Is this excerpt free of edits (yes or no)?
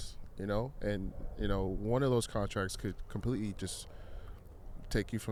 yes